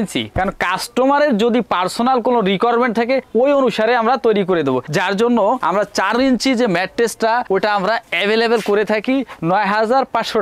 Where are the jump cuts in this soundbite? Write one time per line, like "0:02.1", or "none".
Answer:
none

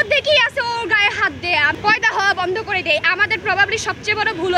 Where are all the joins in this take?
0:01.7

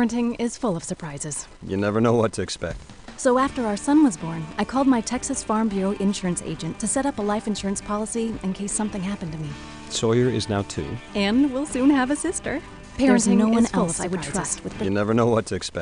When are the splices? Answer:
0:14.8

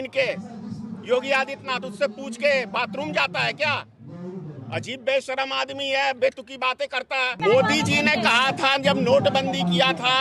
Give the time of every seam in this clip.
0:07.3

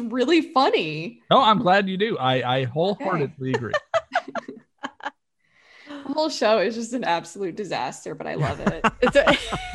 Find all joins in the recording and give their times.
none

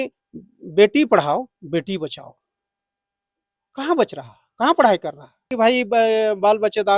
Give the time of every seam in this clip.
0:05.5

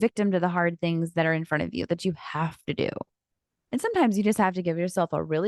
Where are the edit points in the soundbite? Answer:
0:03.5

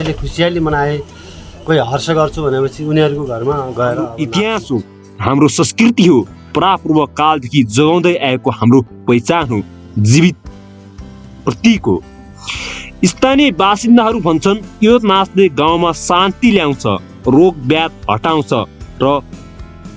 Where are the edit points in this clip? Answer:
0:04.1

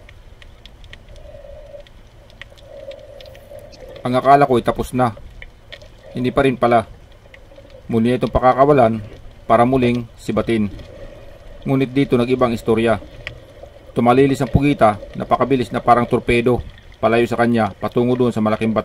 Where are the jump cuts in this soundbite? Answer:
0:04.0

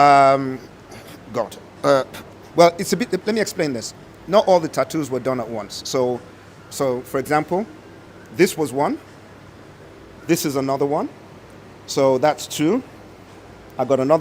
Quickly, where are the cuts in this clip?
none

